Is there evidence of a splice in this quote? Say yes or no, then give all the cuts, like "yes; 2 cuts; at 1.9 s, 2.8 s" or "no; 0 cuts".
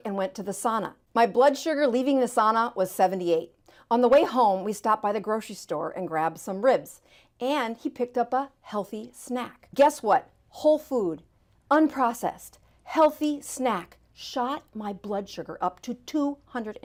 no; 0 cuts